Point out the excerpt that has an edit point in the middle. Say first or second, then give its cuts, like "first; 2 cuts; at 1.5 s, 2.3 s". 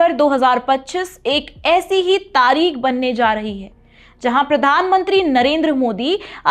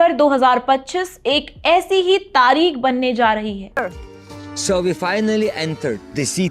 second; 1 cut; at 3.8 s